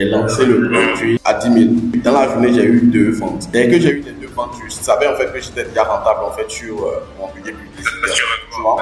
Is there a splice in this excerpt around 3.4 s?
yes; 3 cuts; at 1.2 s, 2.0 s, 3.4 s

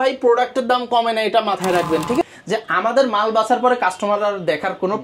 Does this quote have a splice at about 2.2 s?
yes; 1 cut; at 2.2 s

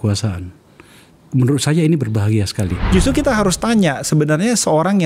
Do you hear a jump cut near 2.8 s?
yes; 1 cut; at 2.8 s

